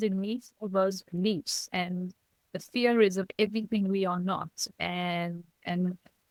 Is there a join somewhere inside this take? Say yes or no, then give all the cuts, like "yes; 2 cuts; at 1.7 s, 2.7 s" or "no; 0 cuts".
no; 0 cuts